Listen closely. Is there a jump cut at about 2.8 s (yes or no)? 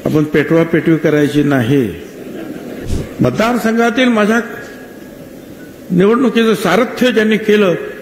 yes